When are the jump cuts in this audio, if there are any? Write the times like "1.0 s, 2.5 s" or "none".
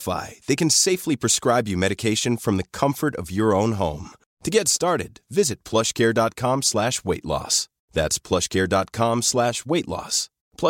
none